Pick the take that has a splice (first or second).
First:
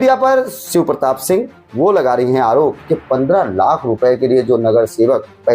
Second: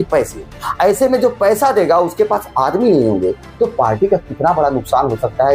first